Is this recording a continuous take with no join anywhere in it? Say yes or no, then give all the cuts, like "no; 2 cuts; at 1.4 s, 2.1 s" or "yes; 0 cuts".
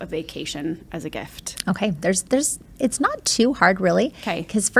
yes; 0 cuts